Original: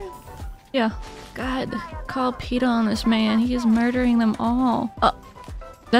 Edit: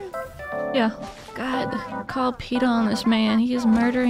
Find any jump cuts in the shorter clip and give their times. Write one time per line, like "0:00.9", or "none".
none